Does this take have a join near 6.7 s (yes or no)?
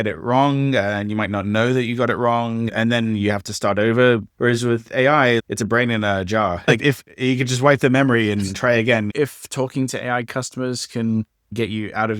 yes